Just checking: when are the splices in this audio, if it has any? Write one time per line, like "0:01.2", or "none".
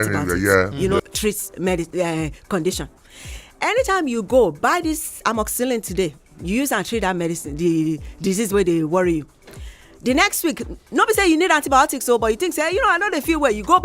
0:01.0